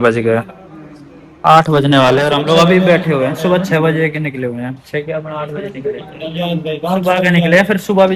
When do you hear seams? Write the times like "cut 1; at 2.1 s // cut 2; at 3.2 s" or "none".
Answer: none